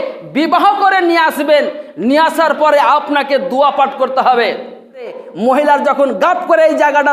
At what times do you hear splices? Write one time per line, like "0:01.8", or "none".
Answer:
0:05.2